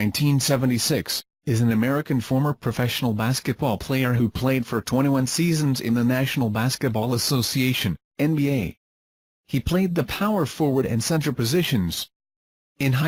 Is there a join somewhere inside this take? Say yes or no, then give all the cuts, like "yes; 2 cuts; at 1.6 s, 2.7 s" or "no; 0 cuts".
no; 0 cuts